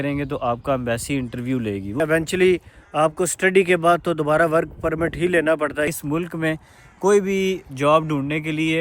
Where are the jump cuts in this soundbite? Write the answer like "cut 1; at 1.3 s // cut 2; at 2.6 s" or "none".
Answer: cut 1; at 2.0 s // cut 2; at 5.9 s